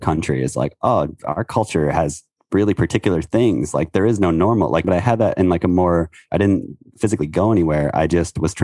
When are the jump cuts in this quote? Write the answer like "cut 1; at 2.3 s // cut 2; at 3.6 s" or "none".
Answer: cut 1; at 4.8 s // cut 2; at 6.9 s